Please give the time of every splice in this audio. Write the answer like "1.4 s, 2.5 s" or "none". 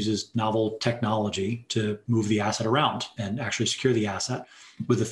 2.0 s, 3.2 s